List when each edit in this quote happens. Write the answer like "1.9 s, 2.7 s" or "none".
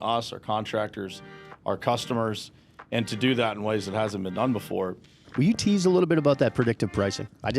5.2 s